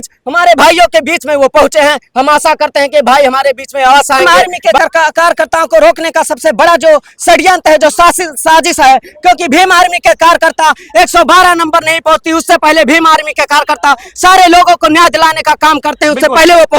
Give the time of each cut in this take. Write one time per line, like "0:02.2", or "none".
0:04.2